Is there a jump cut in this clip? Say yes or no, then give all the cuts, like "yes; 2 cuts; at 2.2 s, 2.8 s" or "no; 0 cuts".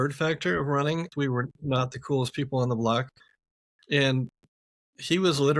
yes; 1 cut; at 1.1 s